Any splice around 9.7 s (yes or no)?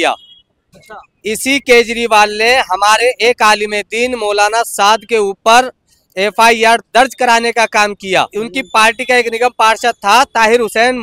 no